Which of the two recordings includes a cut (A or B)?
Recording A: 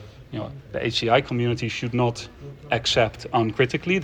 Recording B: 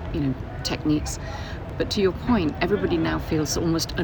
B